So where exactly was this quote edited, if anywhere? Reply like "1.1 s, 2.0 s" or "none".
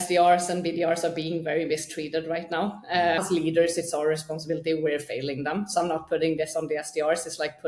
3.2 s